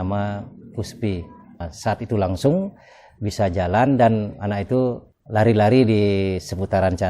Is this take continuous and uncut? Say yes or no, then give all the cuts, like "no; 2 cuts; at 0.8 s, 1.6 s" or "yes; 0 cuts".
no; 2 cuts; at 1.7 s, 5.1 s